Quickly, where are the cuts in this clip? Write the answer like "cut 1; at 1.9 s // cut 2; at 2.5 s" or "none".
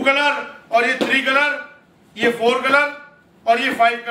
none